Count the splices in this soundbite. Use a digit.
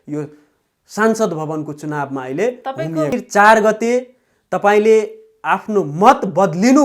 1